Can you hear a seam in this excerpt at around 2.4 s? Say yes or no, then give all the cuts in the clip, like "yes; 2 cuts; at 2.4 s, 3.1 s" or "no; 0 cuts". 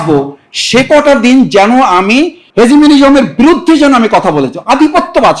yes; 1 cut; at 2.4 s